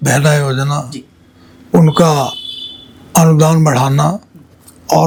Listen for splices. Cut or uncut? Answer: uncut